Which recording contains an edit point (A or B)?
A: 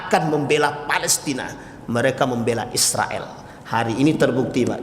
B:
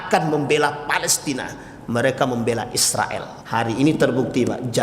B